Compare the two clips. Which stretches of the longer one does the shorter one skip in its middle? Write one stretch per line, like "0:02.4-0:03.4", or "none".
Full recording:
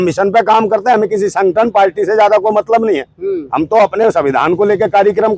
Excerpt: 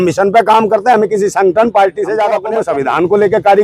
0:02.5-0:03.9